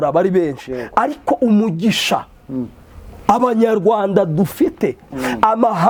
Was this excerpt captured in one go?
yes; 0 cuts

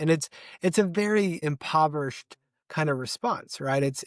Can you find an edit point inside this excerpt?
yes; 1 cut; at 1.4 s

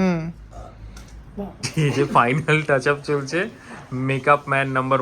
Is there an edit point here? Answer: yes; 1 cut; at 1.6 s

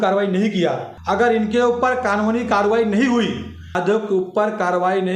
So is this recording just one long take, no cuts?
no; 2 cuts; at 0.9 s, 3.8 s

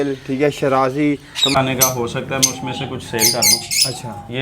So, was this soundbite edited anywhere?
yes; 1 cut; at 1.5 s

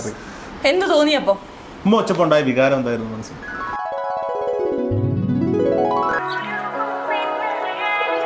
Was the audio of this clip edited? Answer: yes; 1 cut; at 6.2 s

